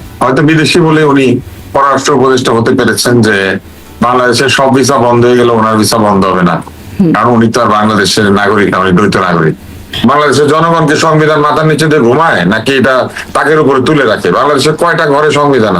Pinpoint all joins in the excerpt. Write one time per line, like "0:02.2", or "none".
0:09.8

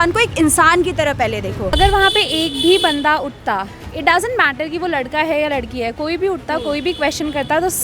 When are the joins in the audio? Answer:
0:01.7

